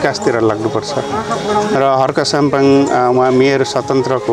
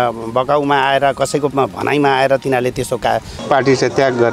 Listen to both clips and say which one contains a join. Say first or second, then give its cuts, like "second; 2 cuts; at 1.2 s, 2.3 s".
second; 1 cut; at 3.3 s